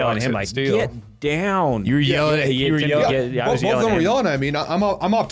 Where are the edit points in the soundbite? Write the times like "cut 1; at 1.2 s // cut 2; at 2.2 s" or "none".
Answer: none